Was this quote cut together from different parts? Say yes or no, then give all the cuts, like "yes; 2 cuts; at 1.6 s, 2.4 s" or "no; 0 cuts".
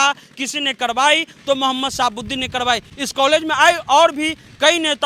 no; 0 cuts